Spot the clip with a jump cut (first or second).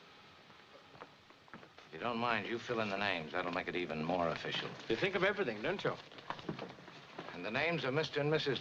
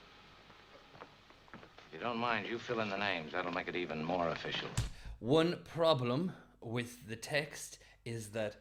first